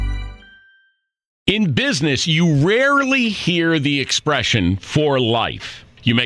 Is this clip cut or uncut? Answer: cut